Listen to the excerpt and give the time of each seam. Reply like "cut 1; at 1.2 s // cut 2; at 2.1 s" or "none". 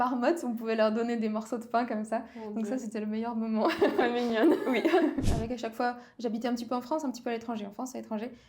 cut 1; at 5.2 s